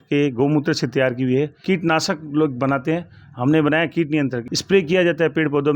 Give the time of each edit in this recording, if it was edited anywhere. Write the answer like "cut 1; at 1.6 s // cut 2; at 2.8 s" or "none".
cut 1; at 1.6 s // cut 2; at 4.5 s